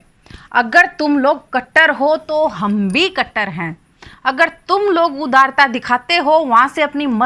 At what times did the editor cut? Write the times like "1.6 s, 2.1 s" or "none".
none